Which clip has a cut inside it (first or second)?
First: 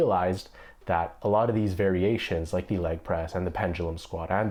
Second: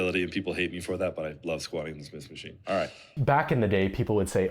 second